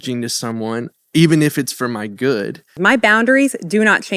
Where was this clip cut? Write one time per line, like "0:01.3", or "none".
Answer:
0:02.7

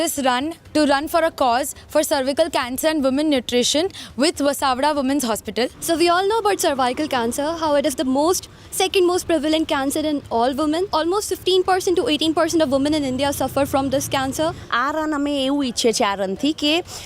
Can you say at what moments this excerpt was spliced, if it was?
0:05.8
0:10.9
0:14.7

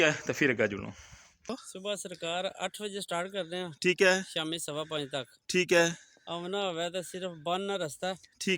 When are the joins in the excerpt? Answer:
0:01.7

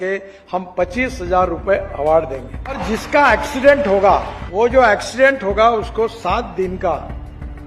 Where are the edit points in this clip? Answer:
0:02.8
0:04.4

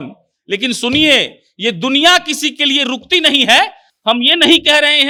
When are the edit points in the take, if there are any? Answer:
none

